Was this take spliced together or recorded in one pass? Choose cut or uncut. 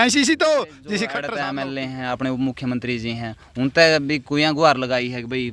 cut